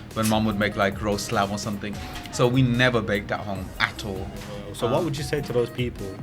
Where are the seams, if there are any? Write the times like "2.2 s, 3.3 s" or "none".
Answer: 4.6 s